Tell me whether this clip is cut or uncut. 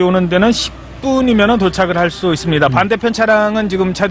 uncut